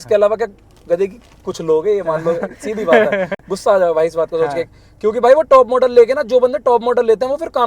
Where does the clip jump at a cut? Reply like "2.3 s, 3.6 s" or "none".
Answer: none

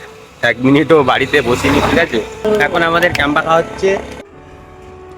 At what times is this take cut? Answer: 2.4 s, 4.2 s

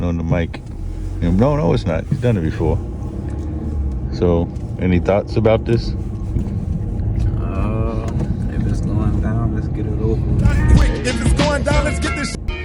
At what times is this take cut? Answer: 10.7 s

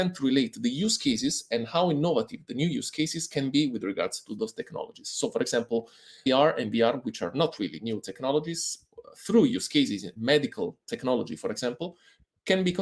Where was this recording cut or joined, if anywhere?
none

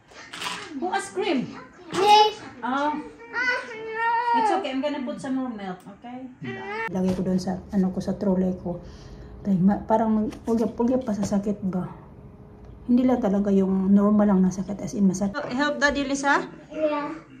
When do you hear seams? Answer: 6.9 s, 15.4 s

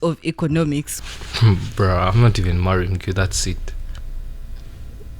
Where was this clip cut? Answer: 0.9 s

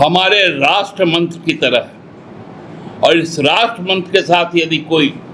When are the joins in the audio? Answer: none

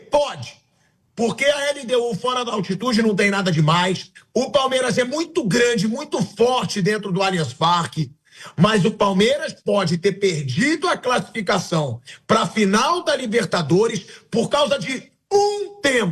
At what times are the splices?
none

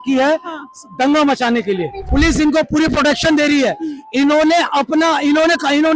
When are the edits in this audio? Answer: 2.0 s

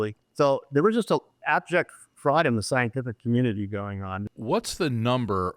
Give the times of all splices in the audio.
4.3 s

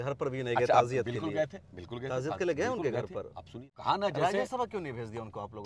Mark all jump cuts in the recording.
3.7 s

